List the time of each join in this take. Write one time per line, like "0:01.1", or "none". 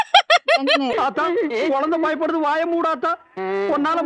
0:00.9